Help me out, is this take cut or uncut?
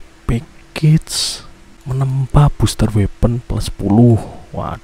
uncut